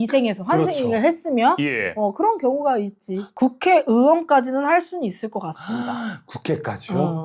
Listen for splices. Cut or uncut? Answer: cut